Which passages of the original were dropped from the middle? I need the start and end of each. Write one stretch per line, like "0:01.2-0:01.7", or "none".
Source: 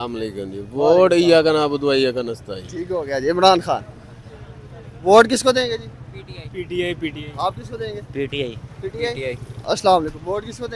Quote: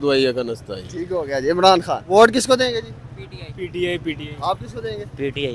0:03.8-0:05.0

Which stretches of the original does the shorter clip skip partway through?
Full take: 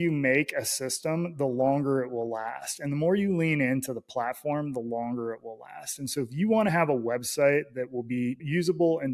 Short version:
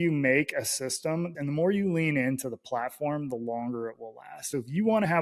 0:01.3-0:02.7
0:05.8-0:06.0

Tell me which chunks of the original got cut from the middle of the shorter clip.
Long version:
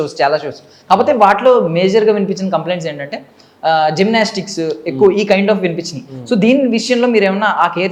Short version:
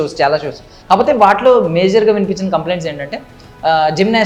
none

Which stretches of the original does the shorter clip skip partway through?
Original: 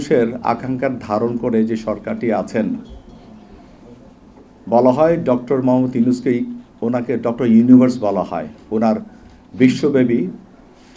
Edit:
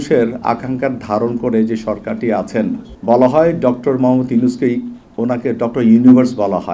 0:02.9-0:04.5

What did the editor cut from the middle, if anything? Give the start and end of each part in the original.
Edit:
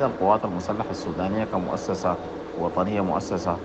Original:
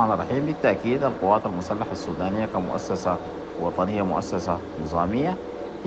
none

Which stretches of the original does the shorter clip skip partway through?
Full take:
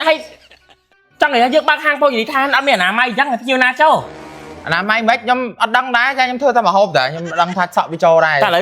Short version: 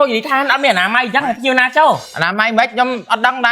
0:04.2-0:04.7

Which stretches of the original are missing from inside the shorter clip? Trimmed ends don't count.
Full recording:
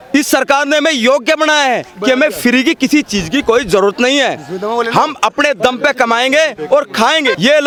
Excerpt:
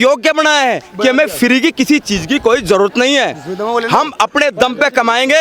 none

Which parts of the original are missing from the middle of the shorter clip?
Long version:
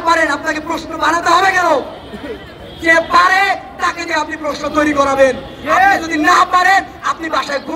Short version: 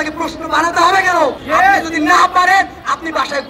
0:01.9-0:05.6

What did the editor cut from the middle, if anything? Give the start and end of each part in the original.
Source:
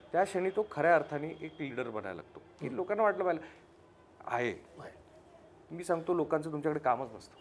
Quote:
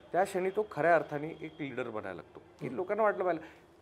none

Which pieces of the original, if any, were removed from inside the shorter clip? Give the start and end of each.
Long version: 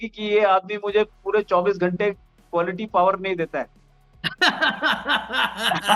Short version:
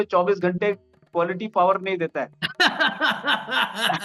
0:03.8-0:04.2

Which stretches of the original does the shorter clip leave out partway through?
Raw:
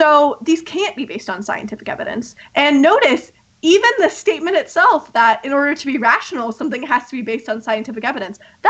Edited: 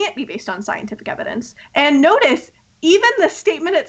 none

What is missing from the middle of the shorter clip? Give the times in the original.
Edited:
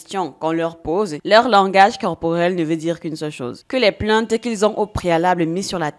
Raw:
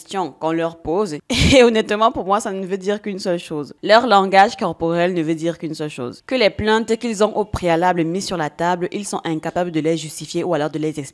0:01.2-0:03.8

